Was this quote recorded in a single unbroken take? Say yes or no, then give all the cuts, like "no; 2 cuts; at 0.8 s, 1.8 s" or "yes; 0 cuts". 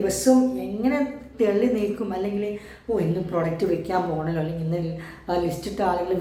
yes; 0 cuts